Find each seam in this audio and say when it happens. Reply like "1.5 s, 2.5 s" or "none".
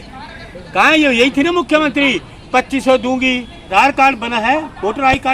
3.6 s